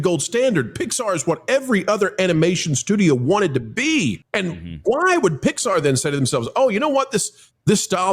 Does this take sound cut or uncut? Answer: cut